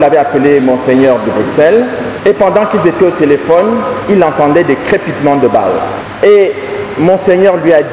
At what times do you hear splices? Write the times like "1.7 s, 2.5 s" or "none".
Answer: 2.1 s, 6.0 s